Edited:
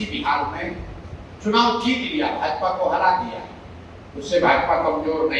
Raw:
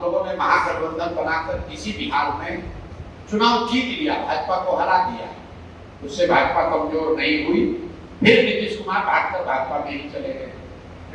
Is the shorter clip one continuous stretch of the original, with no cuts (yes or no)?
yes